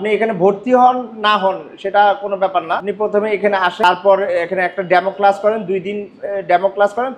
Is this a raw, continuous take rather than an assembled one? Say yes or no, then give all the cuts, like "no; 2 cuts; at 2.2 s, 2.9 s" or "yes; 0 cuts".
no; 2 cuts; at 2.9 s, 3.8 s